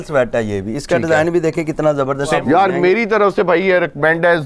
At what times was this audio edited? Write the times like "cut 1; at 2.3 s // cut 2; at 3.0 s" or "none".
cut 1; at 2.4 s